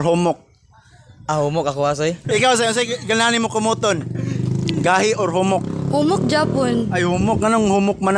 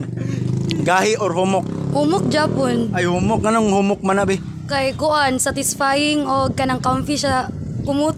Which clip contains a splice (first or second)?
first